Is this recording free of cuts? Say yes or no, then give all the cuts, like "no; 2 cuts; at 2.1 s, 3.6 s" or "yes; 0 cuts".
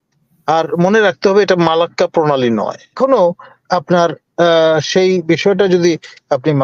no; 1 cut; at 3.0 s